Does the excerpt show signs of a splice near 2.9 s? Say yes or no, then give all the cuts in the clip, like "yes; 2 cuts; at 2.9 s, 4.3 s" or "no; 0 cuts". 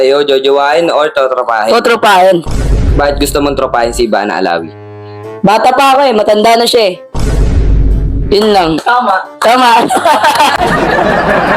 yes; 2 cuts; at 2.9 s, 10.6 s